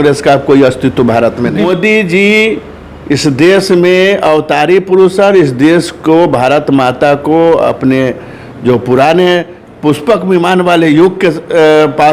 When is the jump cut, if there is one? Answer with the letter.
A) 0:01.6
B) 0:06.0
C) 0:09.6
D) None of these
A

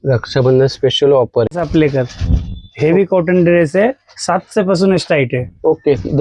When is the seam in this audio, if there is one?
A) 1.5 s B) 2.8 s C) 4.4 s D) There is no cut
A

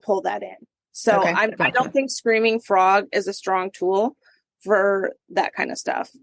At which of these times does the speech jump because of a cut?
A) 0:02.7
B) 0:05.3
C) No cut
B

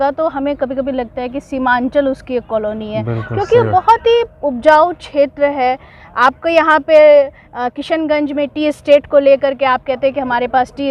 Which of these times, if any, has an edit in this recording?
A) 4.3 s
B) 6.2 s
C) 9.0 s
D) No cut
D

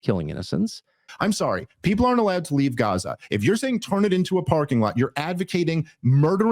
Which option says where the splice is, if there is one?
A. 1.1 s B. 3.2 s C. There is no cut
A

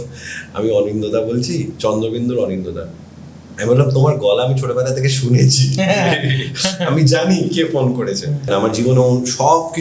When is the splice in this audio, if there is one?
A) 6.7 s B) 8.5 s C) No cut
B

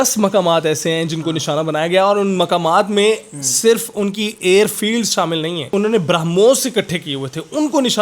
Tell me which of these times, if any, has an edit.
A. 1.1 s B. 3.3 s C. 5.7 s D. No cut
C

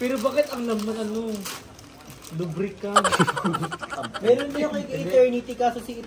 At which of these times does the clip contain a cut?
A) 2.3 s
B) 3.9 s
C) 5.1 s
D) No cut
B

